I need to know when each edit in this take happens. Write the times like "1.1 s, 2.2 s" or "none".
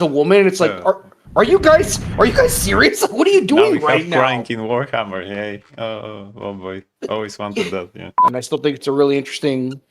8.2 s